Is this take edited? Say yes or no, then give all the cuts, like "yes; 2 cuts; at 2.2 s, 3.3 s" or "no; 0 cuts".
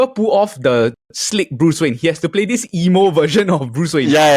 no; 0 cuts